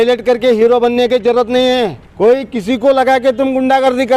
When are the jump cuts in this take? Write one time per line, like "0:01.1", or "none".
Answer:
0:02.0

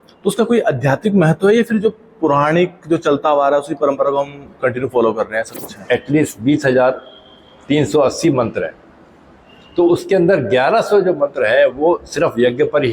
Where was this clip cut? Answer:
0:05.8

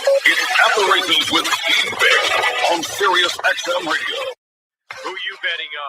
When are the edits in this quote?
0:03.3

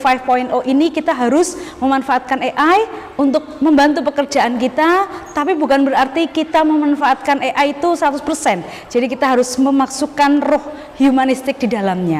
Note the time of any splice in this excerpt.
none

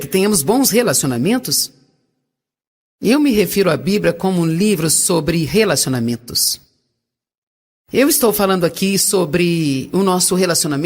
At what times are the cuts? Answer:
none

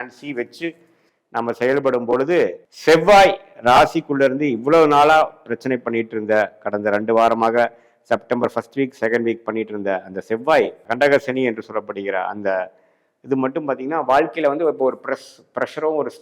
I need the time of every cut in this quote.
0:02.7
0:10.9

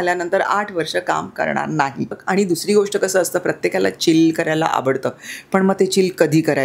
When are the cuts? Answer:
0:02.2

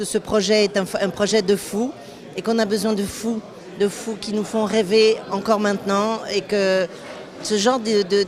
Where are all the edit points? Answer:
0:06.3

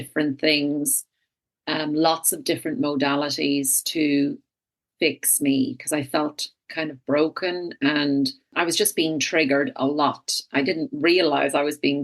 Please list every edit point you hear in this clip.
0:08.5

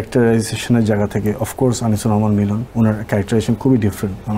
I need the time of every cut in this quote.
0:02.6

